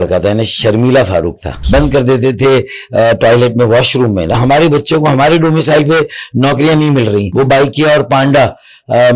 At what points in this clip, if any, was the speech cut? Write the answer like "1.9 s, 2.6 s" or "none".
1.5 s, 4.4 s, 7.3 s